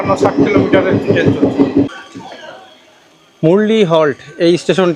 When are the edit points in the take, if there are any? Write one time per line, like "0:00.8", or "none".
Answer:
0:01.9